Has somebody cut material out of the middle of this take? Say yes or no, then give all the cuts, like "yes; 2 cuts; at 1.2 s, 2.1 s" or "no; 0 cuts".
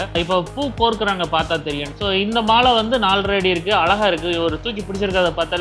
yes; 1 cut; at 1.9 s